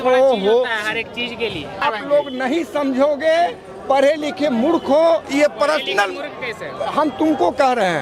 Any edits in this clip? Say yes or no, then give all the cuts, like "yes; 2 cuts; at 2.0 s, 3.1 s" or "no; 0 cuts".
yes; 1 cut; at 1.8 s